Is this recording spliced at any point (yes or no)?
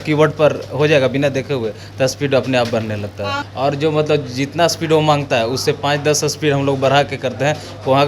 yes